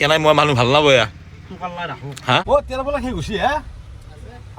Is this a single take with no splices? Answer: no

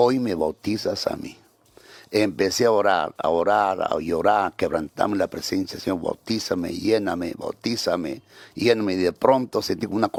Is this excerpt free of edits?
yes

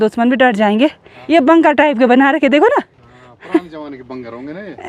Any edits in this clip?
yes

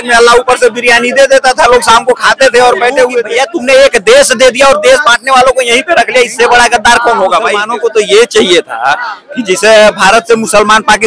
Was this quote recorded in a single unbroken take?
no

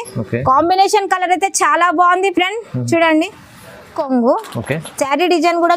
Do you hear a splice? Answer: yes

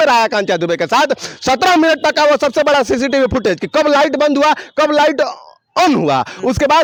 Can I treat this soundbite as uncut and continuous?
yes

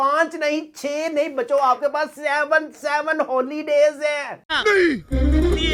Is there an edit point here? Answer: no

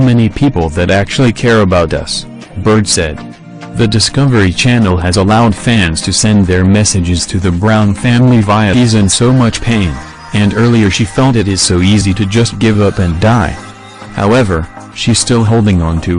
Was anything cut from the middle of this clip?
no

